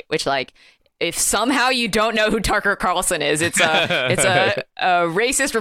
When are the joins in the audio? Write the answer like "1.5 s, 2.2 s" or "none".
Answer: none